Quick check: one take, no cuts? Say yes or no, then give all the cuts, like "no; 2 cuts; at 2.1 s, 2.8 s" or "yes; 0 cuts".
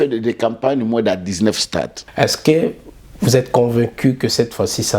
no; 1 cut; at 2.0 s